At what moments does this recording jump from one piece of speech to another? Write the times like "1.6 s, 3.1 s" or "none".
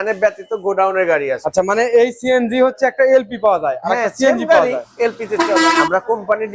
1.4 s, 5.8 s